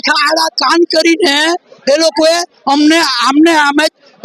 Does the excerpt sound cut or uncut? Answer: uncut